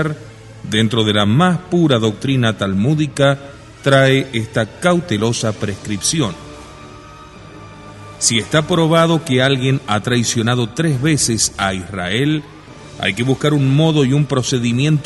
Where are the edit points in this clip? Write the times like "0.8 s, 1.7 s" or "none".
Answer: 9.6 s